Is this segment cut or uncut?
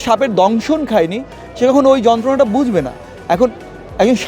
uncut